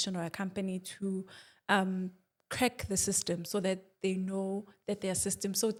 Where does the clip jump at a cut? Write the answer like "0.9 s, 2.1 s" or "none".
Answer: none